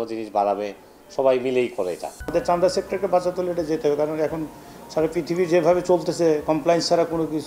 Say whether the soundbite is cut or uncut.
cut